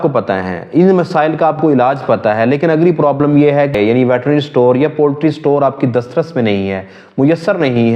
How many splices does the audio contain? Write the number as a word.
one